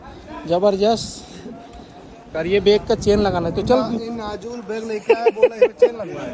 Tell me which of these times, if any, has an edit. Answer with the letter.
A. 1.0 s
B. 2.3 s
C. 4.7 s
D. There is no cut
B